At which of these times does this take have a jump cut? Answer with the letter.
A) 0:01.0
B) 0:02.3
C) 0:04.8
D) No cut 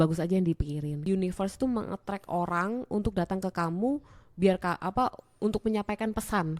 A